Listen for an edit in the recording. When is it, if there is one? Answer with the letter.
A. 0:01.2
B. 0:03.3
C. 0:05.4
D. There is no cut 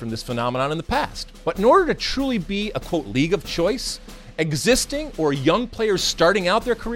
A